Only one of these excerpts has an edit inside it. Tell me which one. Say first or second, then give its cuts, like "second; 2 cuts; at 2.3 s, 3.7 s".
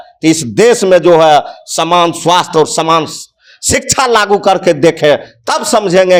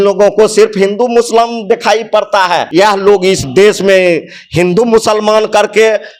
second; 1 cut; at 2.7 s